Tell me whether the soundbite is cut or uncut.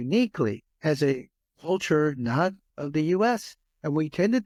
uncut